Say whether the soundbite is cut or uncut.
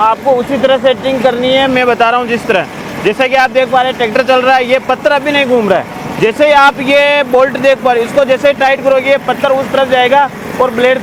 uncut